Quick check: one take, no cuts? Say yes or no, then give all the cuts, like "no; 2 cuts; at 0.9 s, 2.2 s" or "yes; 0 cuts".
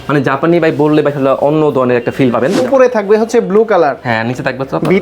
no; 1 cut; at 2.6 s